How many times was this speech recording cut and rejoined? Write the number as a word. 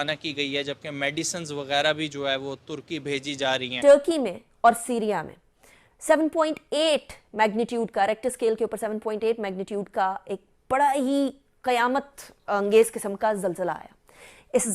one